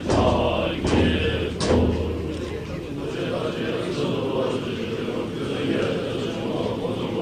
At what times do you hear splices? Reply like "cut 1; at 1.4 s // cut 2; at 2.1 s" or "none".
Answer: none